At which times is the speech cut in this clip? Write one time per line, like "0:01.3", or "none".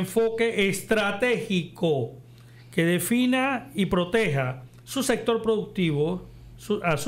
none